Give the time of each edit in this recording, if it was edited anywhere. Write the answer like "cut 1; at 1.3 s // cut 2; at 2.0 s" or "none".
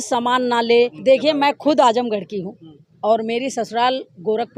cut 1; at 1.0 s